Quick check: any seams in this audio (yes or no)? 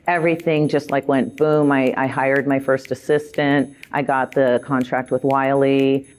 no